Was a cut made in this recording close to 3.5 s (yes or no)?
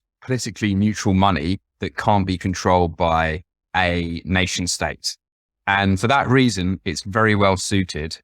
yes